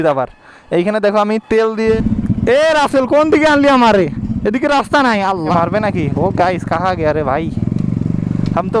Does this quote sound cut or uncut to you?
cut